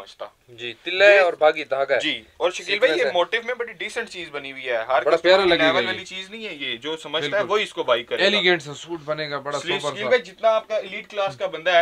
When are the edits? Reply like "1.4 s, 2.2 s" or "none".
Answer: none